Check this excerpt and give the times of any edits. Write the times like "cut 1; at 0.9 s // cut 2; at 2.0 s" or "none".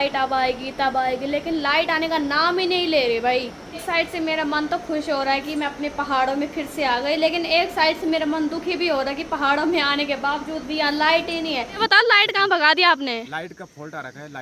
cut 1; at 3.7 s // cut 2; at 11.8 s